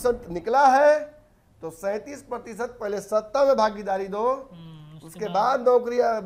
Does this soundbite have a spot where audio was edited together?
no; 0 cuts

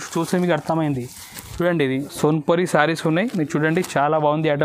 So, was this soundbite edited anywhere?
yes; 1 cut; at 2.1 s

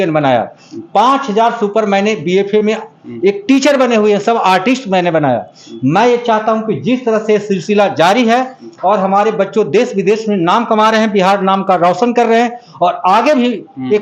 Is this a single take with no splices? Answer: yes; 0 cuts

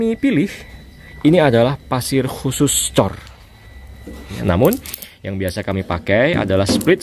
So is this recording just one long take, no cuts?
no; 1 cut; at 4.4 s

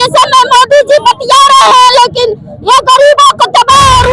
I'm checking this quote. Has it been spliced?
no; 0 cuts

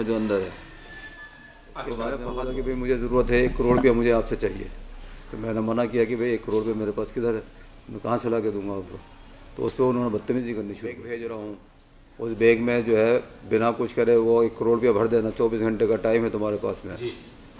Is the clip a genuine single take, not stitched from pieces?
no; 2 cuts; at 2.4 s, 11.0 s

